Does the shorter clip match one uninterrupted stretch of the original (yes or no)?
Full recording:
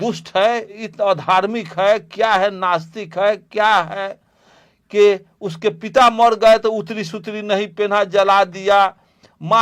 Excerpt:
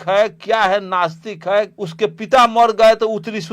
no